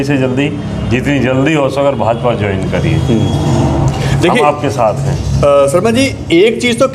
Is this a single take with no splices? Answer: yes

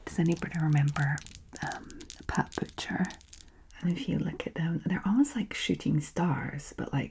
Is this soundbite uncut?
no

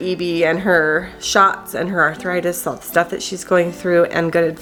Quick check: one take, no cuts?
yes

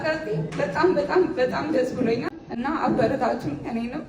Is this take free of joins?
no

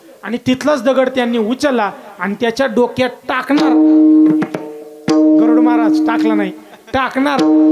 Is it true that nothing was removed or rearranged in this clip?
yes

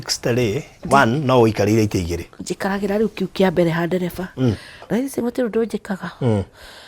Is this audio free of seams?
no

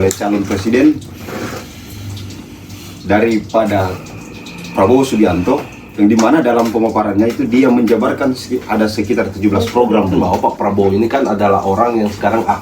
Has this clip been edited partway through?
yes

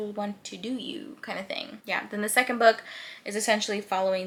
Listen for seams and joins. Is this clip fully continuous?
yes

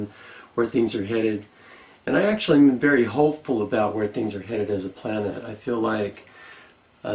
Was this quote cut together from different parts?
yes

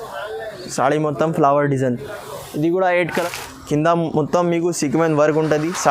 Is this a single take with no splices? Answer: no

